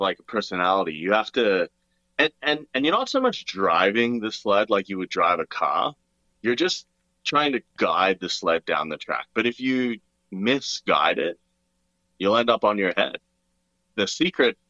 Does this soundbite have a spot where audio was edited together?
yes; 1 cut; at 13.3 s

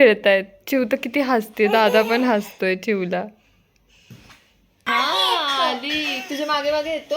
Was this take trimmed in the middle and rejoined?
yes; 1 cut; at 4.9 s

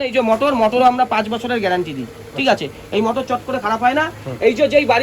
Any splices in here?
no; 0 cuts

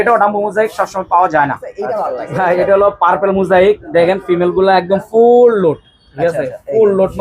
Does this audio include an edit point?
yes; 1 cut; at 2.0 s

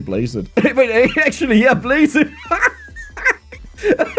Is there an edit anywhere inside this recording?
no; 0 cuts

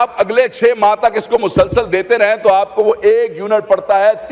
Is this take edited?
no; 0 cuts

